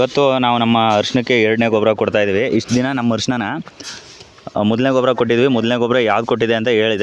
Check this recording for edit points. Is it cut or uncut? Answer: uncut